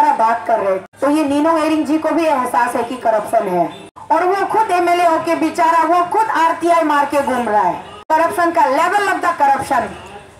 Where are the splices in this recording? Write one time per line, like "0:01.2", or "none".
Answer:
0:00.9
0:03.9
0:07.9